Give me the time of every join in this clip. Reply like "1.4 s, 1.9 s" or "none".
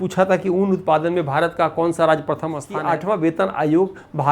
2.7 s